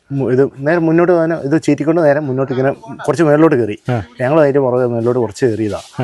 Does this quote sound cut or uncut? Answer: uncut